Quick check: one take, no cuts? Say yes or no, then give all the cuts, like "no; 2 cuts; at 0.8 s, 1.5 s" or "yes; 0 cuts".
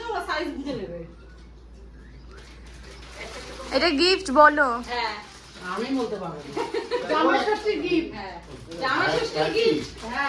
yes; 0 cuts